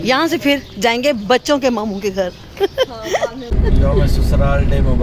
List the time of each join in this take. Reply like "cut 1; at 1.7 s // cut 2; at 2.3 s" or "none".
cut 1; at 3.6 s